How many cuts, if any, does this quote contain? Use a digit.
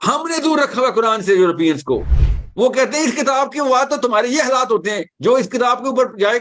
0